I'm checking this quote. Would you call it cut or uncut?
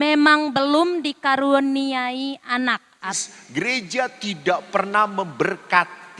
cut